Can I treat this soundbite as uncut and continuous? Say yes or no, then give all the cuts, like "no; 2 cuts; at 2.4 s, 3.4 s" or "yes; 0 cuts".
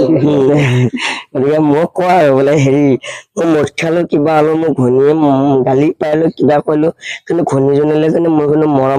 yes; 0 cuts